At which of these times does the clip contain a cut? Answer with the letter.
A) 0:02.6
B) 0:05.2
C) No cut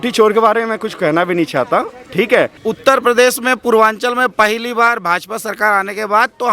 A